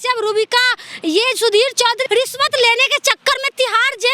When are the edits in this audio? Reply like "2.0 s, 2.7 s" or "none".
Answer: 2.0 s